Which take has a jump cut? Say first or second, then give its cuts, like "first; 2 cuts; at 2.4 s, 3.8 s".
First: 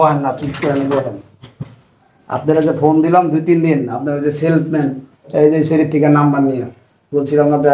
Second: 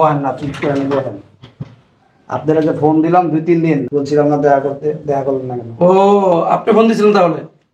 second; 1 cut; at 3.9 s